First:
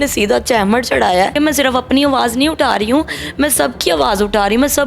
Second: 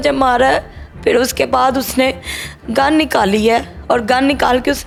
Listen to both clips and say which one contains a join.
first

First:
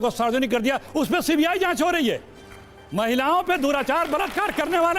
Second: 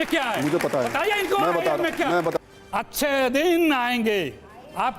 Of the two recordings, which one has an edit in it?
second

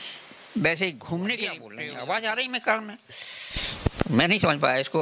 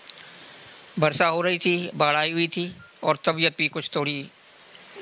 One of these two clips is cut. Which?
first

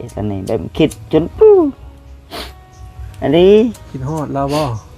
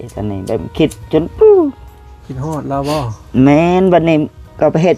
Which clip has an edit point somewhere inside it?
second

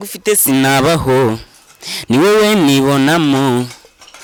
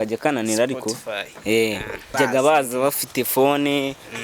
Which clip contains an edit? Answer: second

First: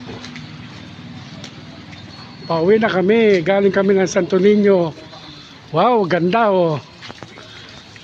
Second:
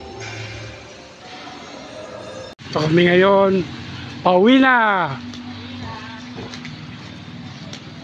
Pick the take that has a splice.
second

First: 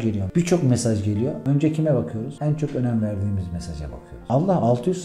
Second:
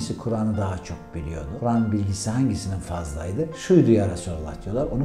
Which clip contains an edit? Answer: second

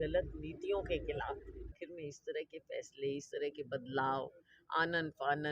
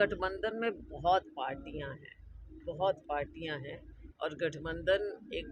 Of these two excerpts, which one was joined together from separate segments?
first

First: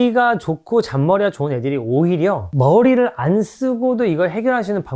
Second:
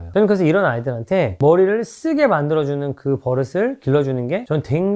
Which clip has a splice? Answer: second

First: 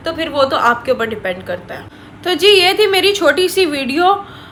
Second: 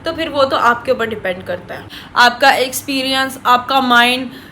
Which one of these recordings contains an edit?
second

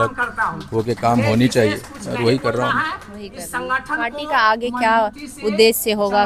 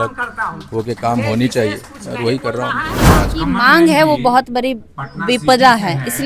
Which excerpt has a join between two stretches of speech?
second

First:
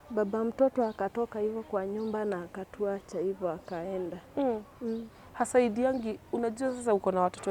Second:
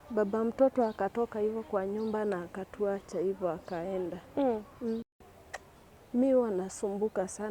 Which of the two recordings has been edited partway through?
second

